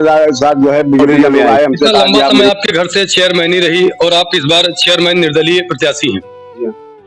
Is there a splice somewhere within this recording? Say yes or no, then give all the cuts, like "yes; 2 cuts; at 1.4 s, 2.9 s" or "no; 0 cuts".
yes; 1 cut; at 2.5 s